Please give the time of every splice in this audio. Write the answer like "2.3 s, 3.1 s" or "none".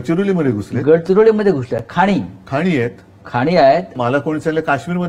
none